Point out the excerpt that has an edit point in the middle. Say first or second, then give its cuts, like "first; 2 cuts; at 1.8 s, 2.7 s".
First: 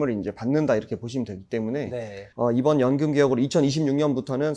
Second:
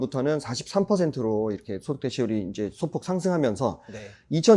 first; 1 cut; at 2.1 s